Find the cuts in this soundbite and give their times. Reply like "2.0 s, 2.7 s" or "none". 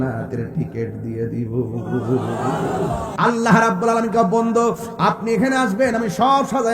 3.1 s